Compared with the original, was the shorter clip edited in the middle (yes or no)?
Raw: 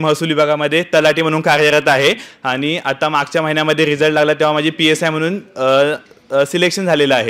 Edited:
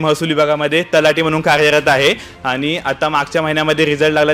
no